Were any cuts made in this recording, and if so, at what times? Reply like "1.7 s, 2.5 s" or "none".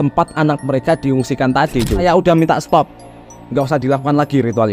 2.0 s